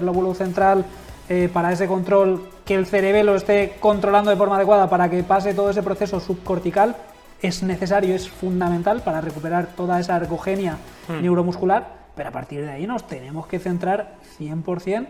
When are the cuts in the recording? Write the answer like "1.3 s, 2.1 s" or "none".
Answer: none